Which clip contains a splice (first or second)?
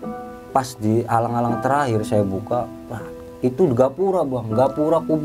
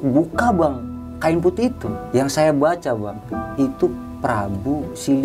second